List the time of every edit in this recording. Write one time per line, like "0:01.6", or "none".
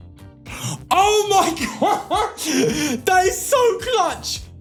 none